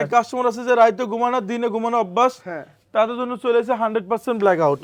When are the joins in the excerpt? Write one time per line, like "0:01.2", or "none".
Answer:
none